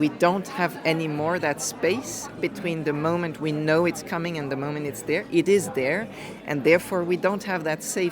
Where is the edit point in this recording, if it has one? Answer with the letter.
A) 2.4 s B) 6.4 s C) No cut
A